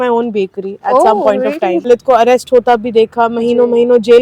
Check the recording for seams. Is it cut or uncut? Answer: cut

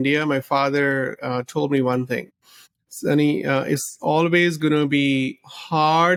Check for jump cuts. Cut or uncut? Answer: uncut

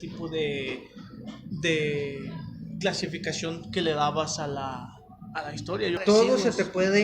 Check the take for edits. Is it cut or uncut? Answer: cut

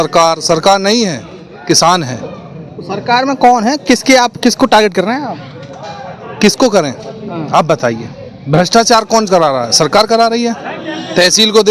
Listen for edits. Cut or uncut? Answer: uncut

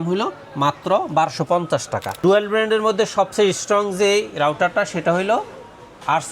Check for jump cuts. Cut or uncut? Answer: cut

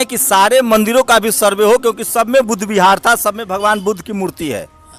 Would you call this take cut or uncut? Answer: uncut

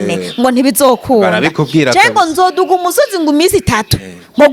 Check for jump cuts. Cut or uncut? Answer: uncut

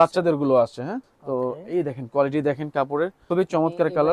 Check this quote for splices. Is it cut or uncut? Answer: cut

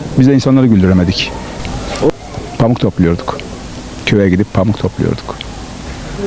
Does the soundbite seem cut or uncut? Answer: cut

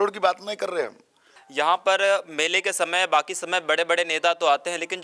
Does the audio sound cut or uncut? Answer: cut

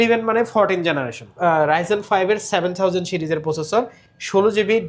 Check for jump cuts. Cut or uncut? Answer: cut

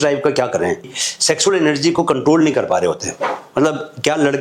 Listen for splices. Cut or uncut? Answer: cut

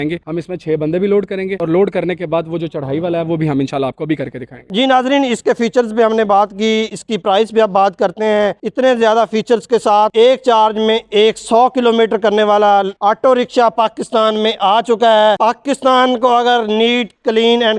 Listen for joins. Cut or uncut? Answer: uncut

